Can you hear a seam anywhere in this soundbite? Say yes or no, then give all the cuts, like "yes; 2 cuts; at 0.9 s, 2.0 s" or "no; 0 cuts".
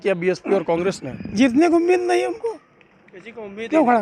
no; 0 cuts